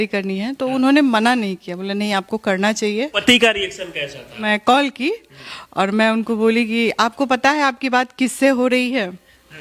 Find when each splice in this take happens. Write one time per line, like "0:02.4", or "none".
0:03.1
0:04.4